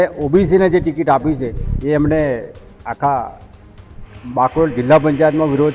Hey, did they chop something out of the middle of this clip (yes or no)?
no